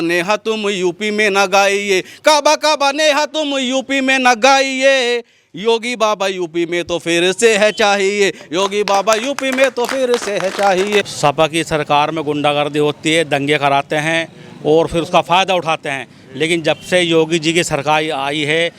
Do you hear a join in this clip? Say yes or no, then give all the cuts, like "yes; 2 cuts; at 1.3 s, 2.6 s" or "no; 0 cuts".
yes; 1 cut; at 11.1 s